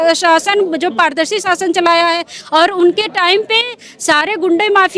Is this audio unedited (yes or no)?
yes